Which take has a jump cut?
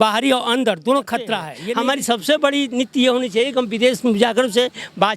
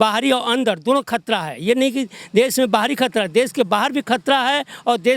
first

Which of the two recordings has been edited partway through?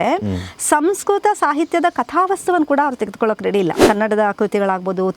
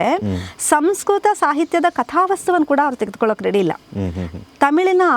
first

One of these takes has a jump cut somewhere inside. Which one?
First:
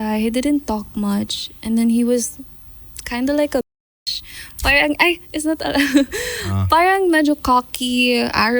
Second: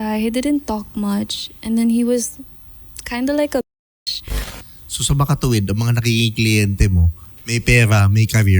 second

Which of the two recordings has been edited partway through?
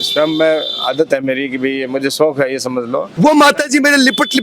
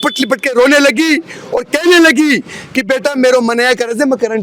first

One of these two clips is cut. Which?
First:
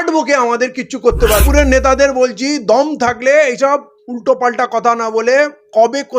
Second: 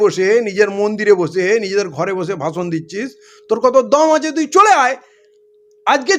first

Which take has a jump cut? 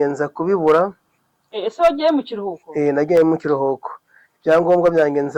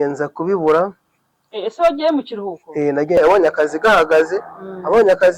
second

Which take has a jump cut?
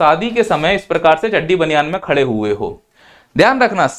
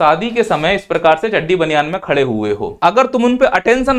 second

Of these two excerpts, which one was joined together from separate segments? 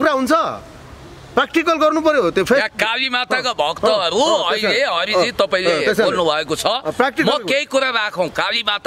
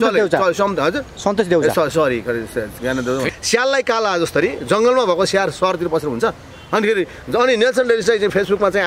second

